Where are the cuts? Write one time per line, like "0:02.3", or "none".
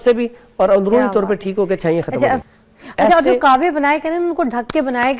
0:02.4